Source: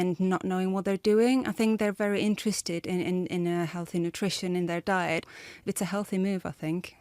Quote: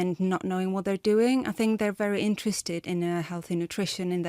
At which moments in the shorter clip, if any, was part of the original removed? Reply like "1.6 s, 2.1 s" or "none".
2.8 s